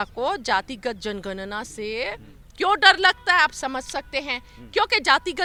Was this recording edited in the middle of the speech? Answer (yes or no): no